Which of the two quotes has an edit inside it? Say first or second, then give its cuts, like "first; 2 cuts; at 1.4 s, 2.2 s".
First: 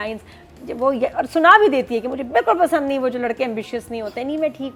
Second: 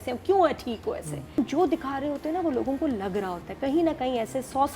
second; 1 cut; at 1.4 s